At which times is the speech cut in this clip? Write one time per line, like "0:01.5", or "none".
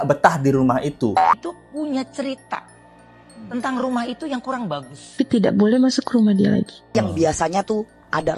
0:01.4
0:05.1
0:06.9